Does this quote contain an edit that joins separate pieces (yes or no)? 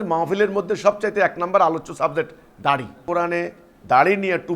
yes